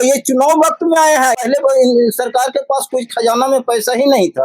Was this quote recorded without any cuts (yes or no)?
no